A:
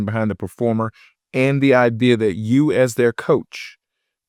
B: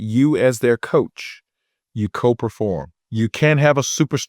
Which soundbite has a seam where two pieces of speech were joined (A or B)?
B